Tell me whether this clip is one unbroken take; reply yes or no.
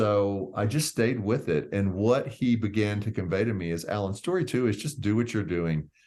yes